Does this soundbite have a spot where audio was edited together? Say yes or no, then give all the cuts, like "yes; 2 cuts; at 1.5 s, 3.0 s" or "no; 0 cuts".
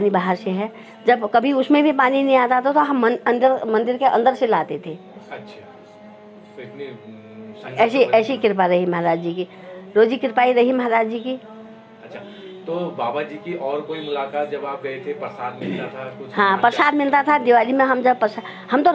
no; 0 cuts